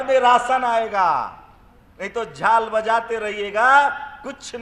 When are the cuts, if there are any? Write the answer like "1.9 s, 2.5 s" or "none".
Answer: none